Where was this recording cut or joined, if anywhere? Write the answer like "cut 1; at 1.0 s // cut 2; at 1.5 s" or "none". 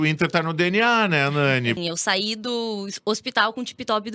cut 1; at 1.8 s